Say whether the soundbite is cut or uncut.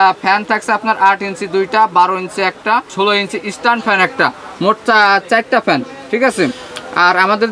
uncut